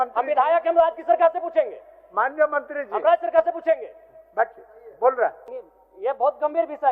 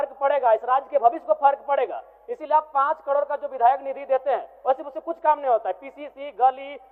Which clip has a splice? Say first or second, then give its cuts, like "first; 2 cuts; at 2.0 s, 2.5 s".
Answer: first; 1 cut; at 5.5 s